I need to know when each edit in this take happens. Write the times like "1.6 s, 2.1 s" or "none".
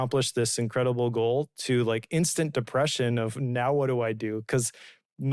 none